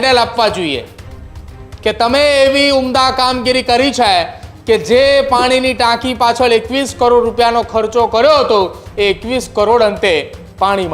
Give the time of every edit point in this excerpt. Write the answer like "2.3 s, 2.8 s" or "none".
none